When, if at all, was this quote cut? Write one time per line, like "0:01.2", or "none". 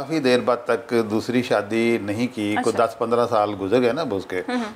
none